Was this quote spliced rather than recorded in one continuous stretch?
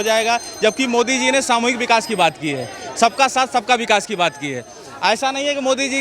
no; 0 cuts

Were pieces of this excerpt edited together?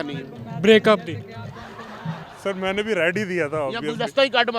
yes; 1 cut; at 2.2 s

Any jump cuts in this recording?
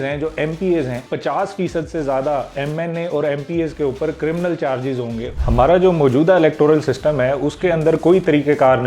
yes; 2 cuts; at 1.0 s, 5.3 s

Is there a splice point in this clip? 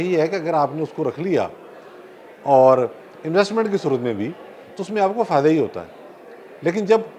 no; 0 cuts

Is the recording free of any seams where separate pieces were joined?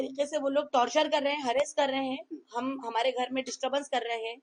yes; 0 cuts

